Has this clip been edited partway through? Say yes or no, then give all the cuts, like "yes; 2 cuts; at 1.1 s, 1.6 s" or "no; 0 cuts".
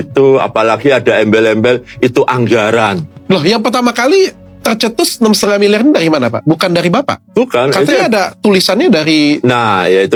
no; 0 cuts